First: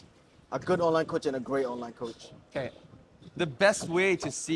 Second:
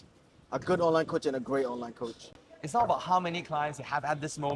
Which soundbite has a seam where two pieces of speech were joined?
second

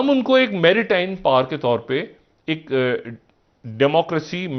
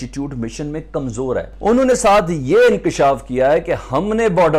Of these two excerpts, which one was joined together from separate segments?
second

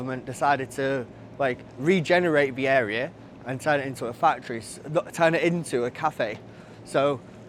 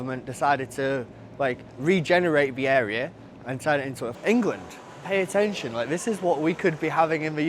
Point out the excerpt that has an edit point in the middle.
second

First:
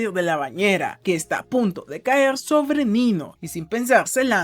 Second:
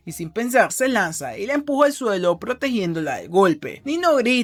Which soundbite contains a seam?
first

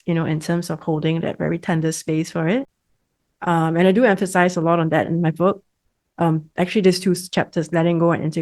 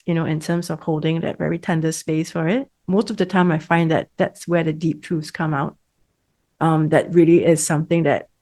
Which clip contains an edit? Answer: second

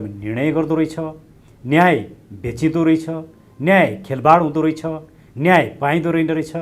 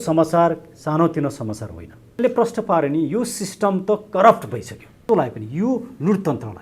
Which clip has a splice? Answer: second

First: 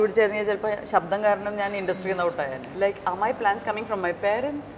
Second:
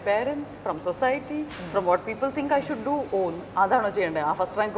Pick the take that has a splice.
first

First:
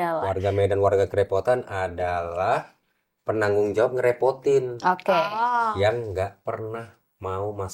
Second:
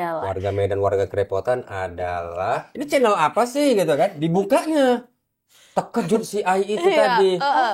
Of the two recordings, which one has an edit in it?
second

